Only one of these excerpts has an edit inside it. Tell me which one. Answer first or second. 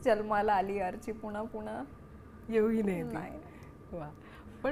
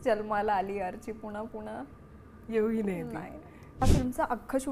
second